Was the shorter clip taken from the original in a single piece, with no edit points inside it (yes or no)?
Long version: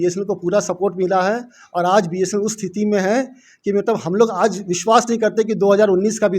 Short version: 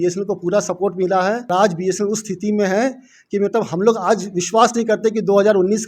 no